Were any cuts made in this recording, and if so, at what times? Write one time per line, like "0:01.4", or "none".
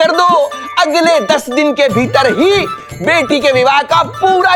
none